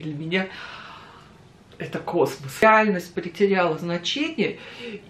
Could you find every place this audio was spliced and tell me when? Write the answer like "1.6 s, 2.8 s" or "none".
2.6 s